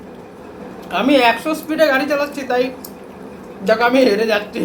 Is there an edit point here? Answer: no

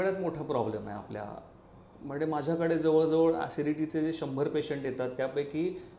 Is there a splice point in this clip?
no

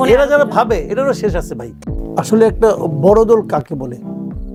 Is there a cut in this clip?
no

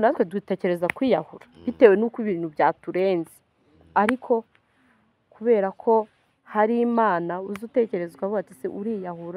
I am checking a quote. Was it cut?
no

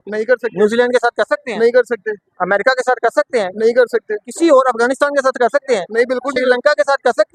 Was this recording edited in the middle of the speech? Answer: no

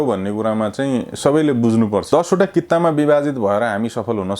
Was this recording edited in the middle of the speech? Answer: yes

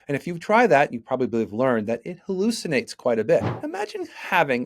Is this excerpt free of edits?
no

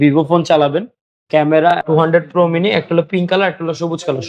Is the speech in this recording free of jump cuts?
no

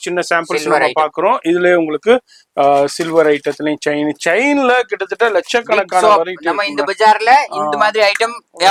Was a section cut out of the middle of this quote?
no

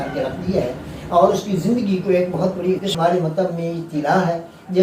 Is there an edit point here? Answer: yes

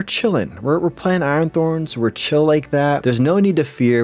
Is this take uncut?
yes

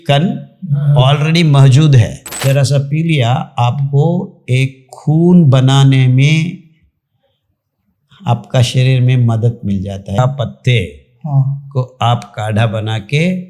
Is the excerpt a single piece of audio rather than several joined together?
no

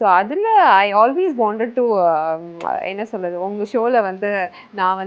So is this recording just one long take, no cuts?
yes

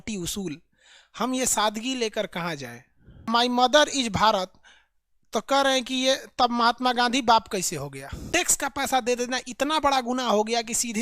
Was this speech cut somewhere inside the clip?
yes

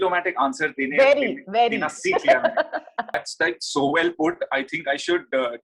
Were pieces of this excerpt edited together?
yes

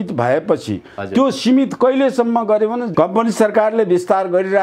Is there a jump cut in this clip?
yes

